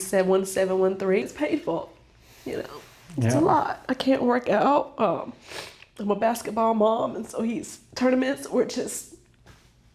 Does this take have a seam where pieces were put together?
yes; 1 cut; at 1.2 s

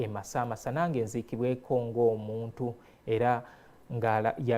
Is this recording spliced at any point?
no; 0 cuts

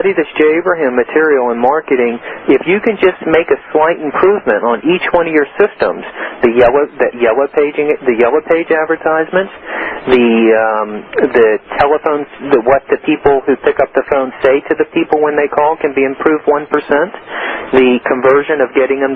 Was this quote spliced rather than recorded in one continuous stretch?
no; 0 cuts

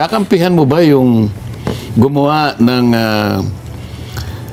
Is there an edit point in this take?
no; 0 cuts

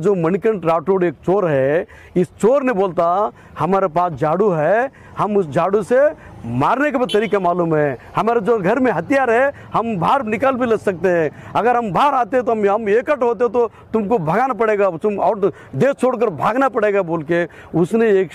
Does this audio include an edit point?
no; 0 cuts

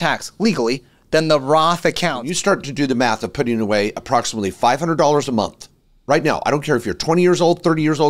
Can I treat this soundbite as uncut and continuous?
no; 1 cut; at 2.1 s

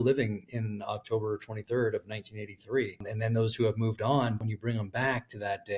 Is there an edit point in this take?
yes; 2 cuts; at 3.1 s, 4.5 s

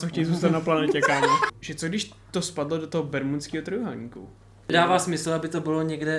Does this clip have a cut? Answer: yes; 2 cuts; at 1.5 s, 4.7 s

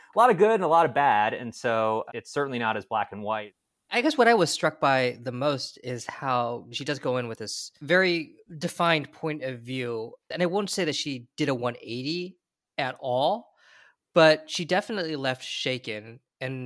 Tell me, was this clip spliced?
yes; 5 cuts; at 2.2 s, 4.0 s, 6.7 s, 7.8 s, 10.3 s

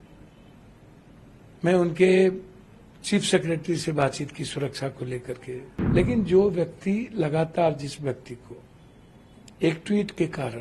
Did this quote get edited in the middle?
yes; 1 cut; at 5.7 s

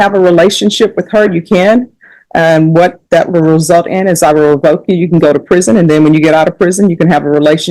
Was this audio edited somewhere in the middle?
no; 0 cuts

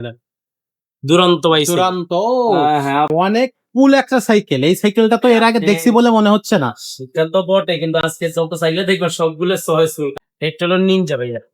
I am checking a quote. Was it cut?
yes; 2 cuts; at 3.1 s, 10.2 s

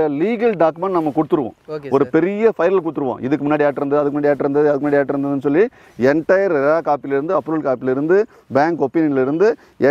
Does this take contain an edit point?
no; 0 cuts

